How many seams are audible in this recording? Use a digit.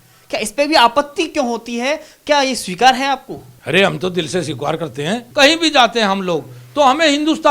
1